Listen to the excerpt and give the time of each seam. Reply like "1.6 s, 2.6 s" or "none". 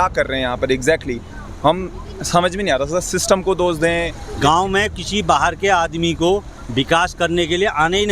4.2 s